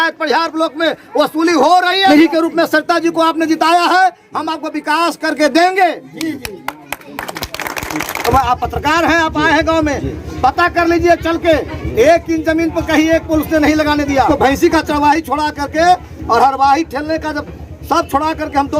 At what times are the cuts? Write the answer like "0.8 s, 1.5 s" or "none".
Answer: 2.1 s, 8.2 s, 14.3 s